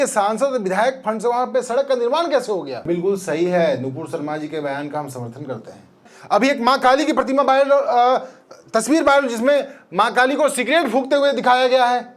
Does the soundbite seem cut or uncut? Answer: cut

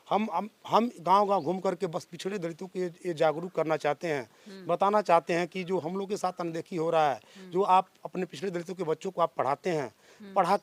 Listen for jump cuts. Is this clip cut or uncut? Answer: uncut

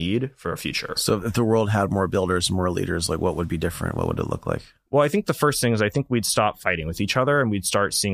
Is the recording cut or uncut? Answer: uncut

